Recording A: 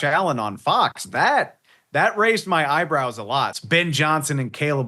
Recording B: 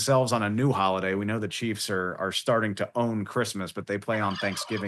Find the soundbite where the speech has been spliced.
A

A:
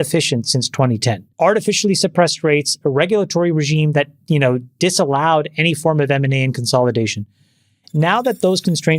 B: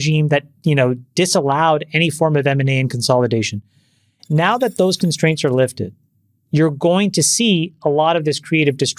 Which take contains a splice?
A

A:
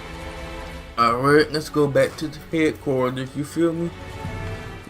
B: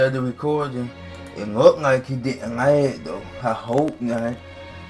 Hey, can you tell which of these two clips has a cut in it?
A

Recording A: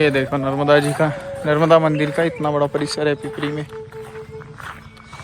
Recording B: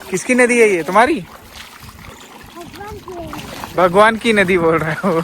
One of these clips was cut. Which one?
B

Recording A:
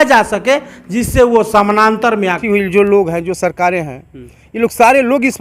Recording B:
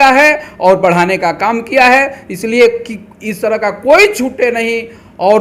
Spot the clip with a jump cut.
A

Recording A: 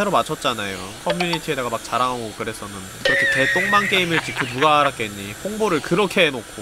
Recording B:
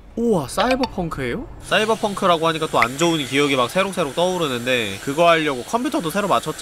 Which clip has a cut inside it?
B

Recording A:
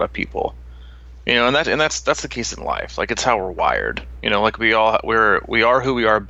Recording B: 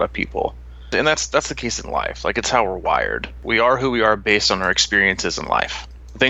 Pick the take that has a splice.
B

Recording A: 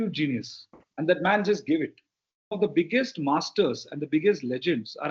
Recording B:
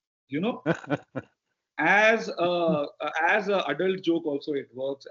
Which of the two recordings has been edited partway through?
A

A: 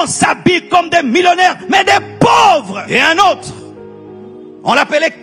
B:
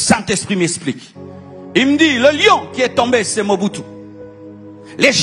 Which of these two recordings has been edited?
A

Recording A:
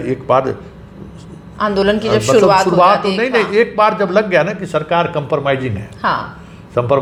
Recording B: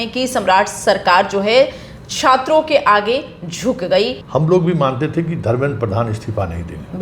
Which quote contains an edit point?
B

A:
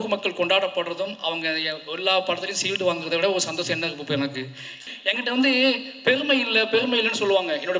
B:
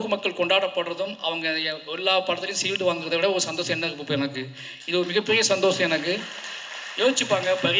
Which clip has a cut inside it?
A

